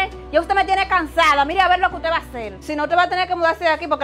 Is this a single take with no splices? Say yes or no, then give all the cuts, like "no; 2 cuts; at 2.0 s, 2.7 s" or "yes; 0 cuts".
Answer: yes; 0 cuts